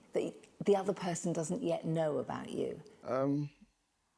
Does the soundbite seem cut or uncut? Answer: cut